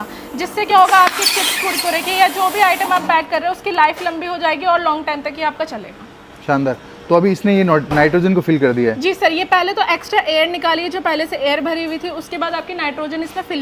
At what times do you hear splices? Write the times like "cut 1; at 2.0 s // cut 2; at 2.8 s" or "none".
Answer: none